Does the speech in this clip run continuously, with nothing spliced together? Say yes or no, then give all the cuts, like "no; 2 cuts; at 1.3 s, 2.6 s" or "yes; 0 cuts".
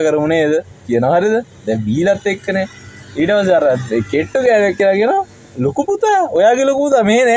yes; 0 cuts